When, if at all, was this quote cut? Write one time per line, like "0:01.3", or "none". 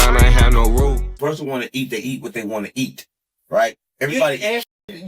0:01.2